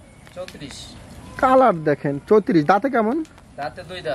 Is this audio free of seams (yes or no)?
yes